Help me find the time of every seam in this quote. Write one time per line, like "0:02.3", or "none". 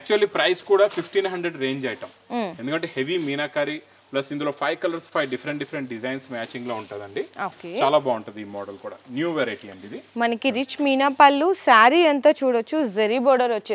none